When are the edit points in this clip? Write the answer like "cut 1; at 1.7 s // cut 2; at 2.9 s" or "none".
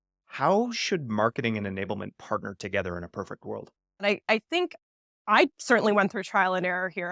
cut 1; at 4.0 s